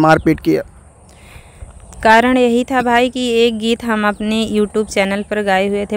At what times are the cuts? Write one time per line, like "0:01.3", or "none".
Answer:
none

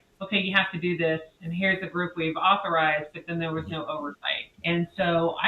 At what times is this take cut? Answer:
0:01.4

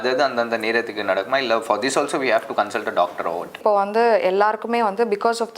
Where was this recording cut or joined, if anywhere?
0:03.6

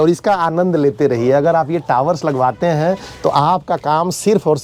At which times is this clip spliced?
none

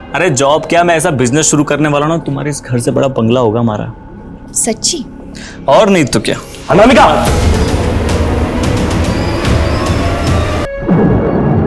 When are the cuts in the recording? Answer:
0:10.6

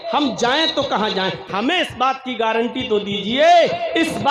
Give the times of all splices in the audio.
0:01.5

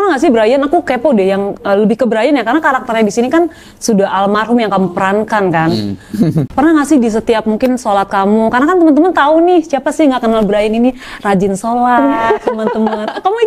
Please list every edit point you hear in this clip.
0:06.5

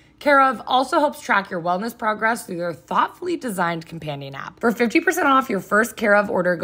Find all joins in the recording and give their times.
0:04.4

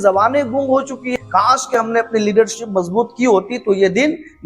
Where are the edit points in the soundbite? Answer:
0:01.1

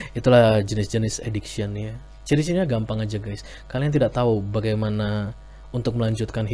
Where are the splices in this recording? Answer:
none

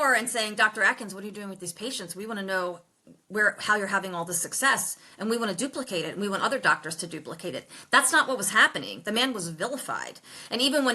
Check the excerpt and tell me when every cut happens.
none

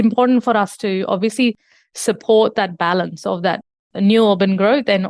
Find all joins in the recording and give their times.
none

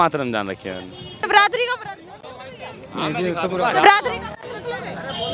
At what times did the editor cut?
0:01.2

